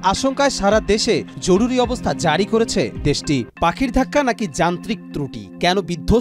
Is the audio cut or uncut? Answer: cut